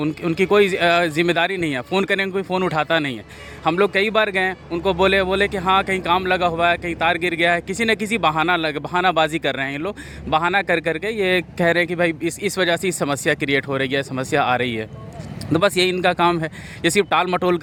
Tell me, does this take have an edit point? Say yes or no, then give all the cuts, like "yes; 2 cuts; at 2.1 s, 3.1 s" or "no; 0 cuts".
no; 0 cuts